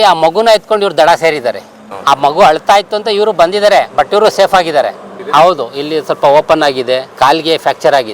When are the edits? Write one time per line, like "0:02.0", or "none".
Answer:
0:07.1